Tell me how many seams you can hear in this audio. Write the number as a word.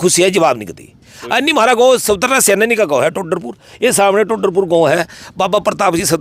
zero